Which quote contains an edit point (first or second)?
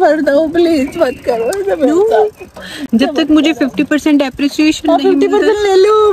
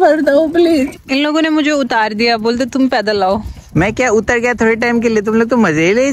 second